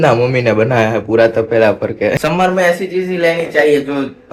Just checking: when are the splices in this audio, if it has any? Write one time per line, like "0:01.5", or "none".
0:02.2

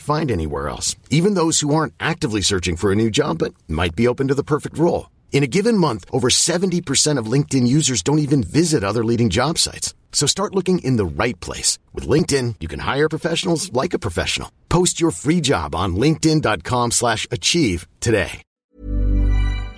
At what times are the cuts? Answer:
0:18.4

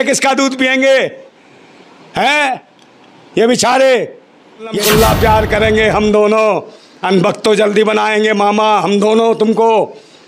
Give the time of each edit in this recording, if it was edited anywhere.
0:04.8

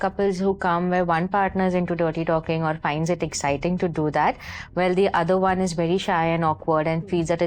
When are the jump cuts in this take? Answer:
none

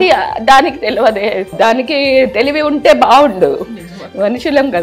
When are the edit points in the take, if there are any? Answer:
0:01.5

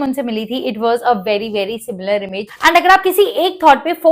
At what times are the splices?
0:02.5

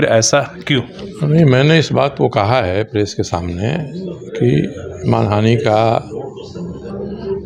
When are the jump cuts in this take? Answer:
none

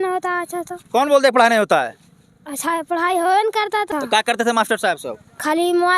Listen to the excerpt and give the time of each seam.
0:03.9

